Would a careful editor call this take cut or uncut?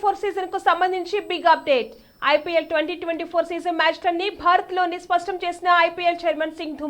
uncut